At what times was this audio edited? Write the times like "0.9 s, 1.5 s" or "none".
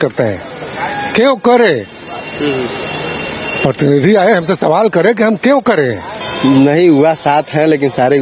6.2 s

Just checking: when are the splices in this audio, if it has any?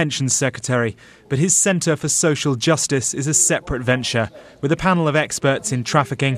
none

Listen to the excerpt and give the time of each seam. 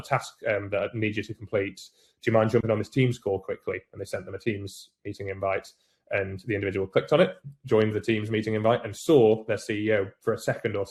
none

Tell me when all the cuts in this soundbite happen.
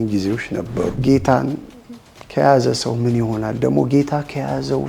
1.0 s

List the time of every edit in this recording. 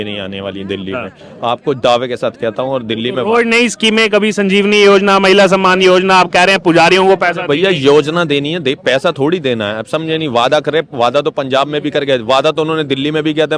none

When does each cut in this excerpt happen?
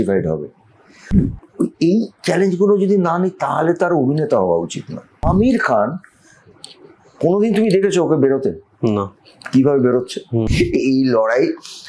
1.1 s, 5.1 s, 10.5 s

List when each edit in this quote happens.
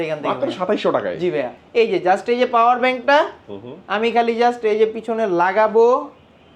1.6 s

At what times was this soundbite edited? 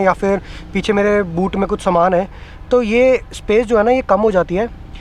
none

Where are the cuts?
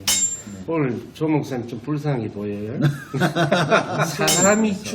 4.0 s

